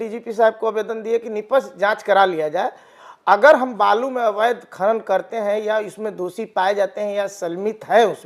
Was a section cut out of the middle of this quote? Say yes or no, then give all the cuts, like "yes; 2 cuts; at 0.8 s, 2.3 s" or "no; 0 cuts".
no; 0 cuts